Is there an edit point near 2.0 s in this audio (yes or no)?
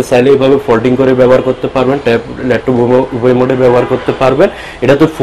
no